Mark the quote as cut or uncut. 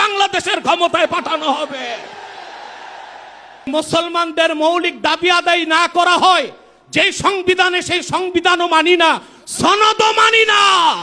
cut